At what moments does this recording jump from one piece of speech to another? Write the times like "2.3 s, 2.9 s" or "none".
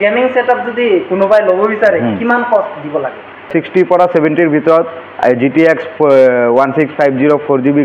3.5 s